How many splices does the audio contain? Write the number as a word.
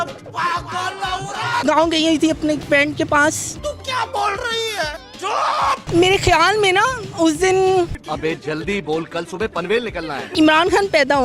four